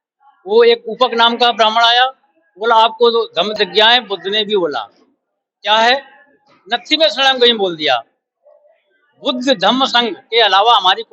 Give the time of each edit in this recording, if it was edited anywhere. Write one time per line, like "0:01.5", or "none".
0:03.5

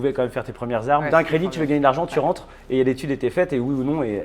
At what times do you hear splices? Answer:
0:01.1

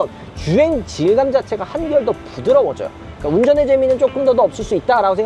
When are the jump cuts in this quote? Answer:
0:03.2

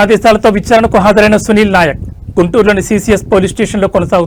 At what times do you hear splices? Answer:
none

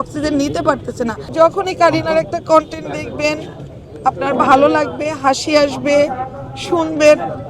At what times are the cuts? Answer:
0:01.2

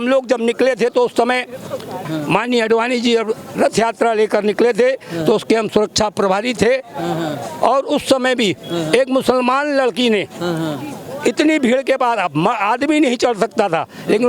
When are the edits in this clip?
0:02.1

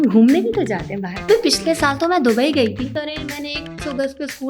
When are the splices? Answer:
0:01.2
0:02.9

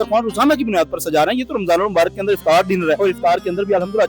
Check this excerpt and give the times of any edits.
0:03.0

